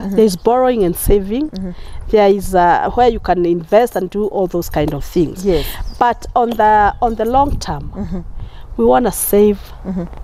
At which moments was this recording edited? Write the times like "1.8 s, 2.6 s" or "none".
none